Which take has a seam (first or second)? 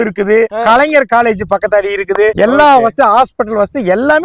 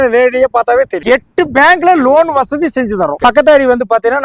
second